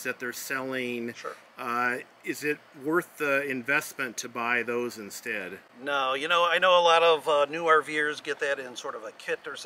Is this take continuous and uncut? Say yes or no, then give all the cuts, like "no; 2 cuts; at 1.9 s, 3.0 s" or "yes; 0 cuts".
yes; 0 cuts